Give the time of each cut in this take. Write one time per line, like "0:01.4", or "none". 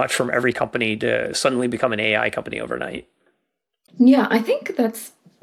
none